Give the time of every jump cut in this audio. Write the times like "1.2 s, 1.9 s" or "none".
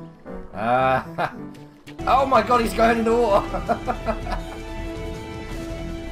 none